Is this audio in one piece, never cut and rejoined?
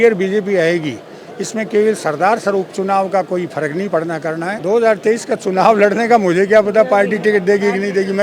no; 1 cut; at 4.5 s

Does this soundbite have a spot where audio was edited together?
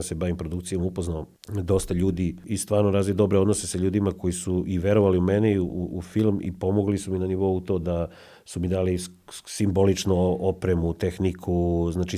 yes; 2 cuts; at 1.4 s, 2.4 s

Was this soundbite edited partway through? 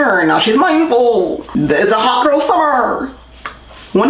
yes; 1 cut; at 1.4 s

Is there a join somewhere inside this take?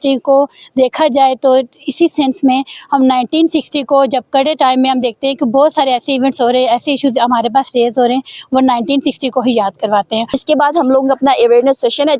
yes; 1 cut; at 10.3 s

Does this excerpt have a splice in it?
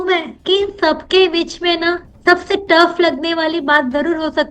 no; 0 cuts

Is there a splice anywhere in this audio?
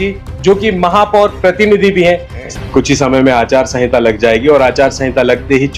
yes; 1 cut; at 2.4 s

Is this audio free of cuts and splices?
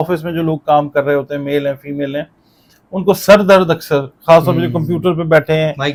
yes; 0 cuts

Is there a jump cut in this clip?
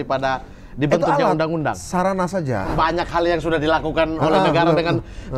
yes; 1 cut; at 2.7 s

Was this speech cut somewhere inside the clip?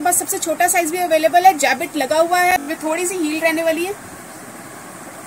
yes; 1 cut; at 2.7 s

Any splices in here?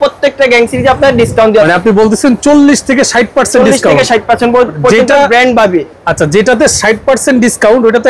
no; 0 cuts

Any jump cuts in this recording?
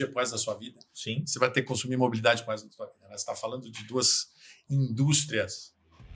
no; 0 cuts

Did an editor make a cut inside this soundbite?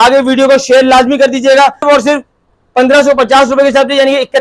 yes; 1 cut; at 1.8 s

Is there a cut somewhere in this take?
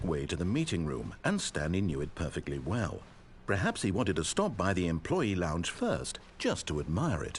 no; 0 cuts

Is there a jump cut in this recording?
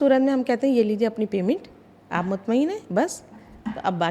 no; 0 cuts

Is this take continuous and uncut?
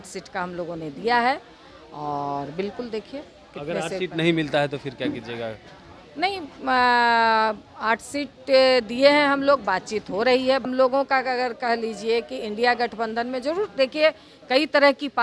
no; 1 cut; at 10.6 s

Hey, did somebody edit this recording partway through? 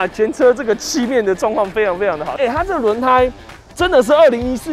yes; 1 cut; at 2.3 s

